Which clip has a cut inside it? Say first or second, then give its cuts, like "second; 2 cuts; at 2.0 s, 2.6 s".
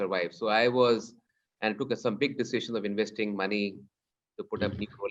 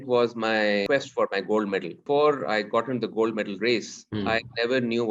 second; 3 cuts; at 0.8 s, 2.0 s, 4.0 s